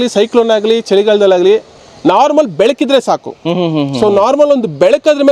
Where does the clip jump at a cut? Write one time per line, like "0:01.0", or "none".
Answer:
none